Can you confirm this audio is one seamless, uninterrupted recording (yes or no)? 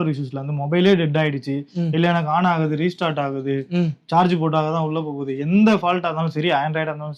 yes